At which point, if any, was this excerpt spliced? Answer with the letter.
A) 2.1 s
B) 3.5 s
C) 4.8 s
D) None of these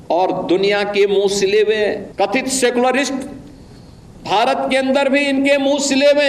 A